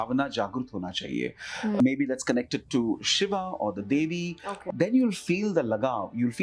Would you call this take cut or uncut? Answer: cut